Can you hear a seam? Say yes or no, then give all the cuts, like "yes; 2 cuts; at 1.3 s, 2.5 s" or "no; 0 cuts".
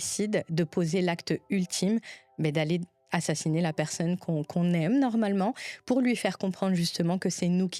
no; 0 cuts